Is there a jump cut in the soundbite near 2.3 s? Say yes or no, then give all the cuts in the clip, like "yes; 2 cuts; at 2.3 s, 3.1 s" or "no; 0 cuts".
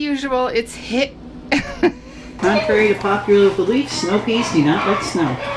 yes; 1 cut; at 2.3 s